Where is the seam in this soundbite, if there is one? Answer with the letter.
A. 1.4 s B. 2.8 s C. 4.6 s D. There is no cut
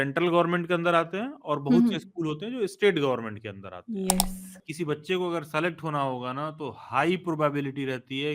C